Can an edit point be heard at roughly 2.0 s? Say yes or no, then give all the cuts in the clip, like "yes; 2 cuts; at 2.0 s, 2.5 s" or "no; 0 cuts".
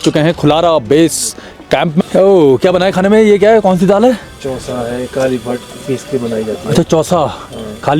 yes; 1 cut; at 2.0 s